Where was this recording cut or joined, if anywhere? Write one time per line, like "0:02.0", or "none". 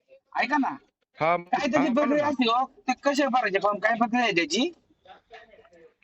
0:01.4